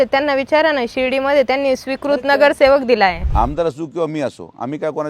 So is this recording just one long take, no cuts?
no; 1 cut; at 3.2 s

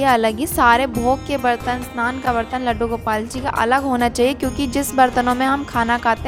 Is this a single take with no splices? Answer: yes; 0 cuts

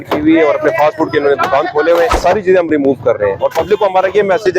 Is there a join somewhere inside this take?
yes; 1 cut; at 2.2 s

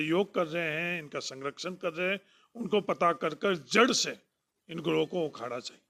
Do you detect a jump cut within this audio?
no; 0 cuts

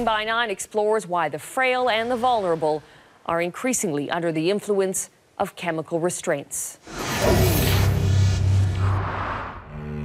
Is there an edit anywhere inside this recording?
yes; 1 cut; at 1.9 s

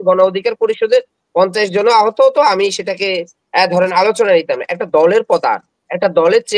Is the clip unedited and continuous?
yes; 0 cuts

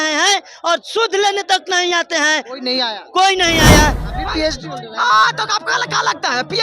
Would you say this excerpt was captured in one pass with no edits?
no; 1 cut; at 4.0 s

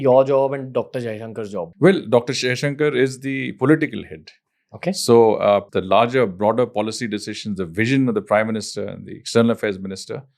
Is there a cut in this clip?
yes; 2 cuts; at 1.6 s, 5.7 s

